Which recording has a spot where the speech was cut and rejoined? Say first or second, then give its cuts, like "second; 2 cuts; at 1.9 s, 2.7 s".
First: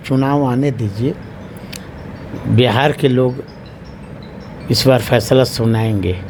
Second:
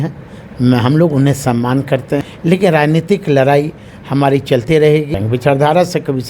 second; 2 cuts; at 2.3 s, 5.1 s